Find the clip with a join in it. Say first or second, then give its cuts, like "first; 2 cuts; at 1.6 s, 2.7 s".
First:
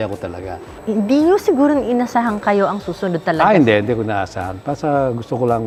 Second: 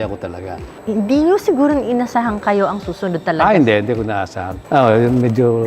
second; 1 cut; at 4.5 s